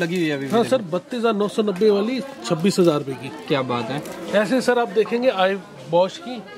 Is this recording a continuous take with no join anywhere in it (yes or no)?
yes